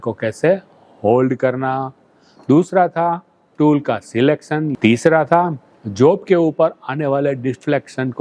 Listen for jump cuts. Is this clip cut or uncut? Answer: cut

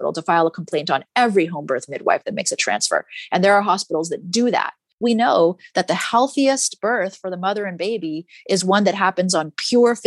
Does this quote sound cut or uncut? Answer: cut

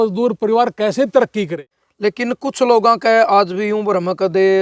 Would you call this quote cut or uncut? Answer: cut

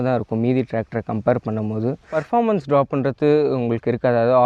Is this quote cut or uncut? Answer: cut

